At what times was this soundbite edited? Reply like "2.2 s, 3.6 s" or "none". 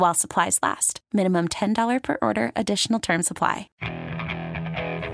3.8 s